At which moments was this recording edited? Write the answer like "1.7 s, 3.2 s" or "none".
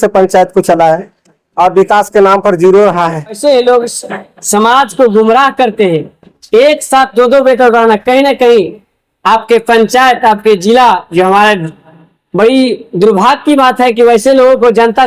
3.4 s